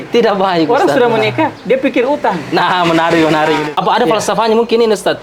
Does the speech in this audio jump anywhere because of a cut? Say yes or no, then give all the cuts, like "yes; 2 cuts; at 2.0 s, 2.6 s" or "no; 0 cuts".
no; 0 cuts